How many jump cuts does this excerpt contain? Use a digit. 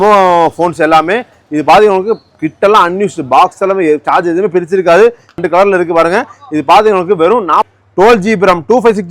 2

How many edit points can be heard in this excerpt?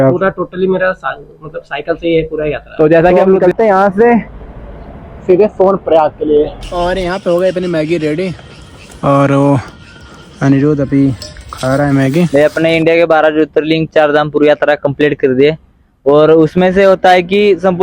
3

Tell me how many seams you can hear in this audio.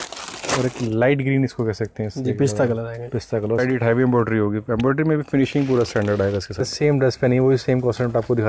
2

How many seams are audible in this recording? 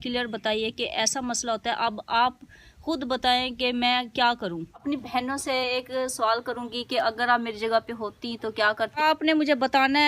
2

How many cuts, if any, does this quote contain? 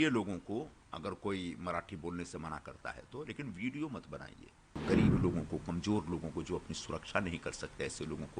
1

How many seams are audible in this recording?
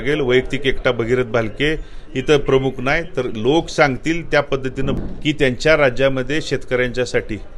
1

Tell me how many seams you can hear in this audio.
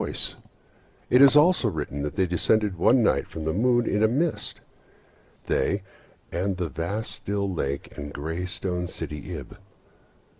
1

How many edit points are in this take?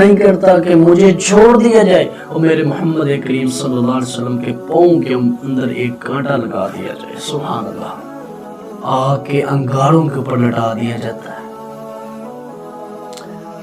1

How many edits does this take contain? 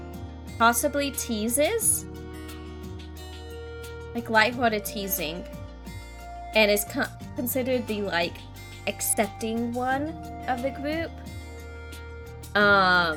0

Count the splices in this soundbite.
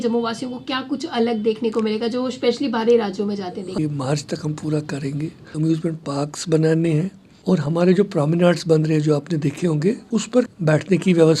4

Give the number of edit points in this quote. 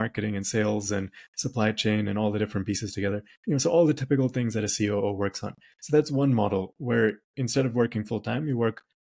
0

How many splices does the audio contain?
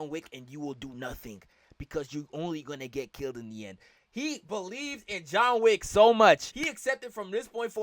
1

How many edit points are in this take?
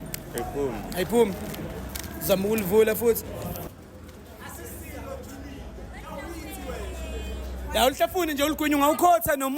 1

